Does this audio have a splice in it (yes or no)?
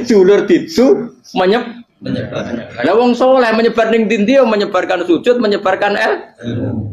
no